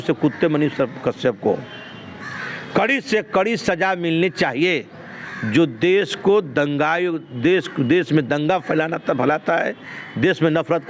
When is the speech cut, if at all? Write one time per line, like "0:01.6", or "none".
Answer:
none